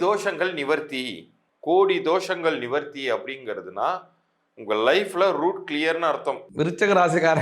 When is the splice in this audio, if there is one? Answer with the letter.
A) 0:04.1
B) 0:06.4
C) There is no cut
B